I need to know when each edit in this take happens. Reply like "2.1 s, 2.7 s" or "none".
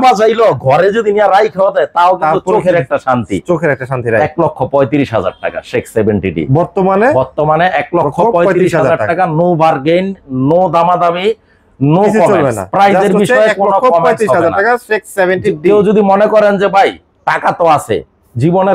none